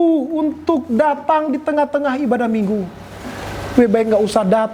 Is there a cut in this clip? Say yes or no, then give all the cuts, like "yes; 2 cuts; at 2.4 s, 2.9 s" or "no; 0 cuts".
no; 0 cuts